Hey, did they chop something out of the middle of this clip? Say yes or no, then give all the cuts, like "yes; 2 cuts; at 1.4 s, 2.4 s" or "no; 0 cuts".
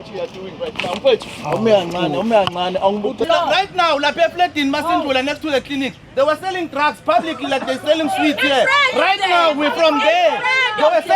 yes; 1 cut; at 3.2 s